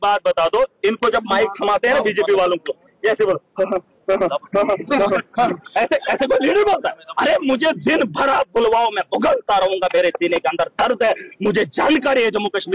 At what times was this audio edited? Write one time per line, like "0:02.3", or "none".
none